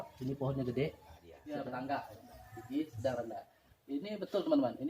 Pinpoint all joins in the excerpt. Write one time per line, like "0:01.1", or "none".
0:01.3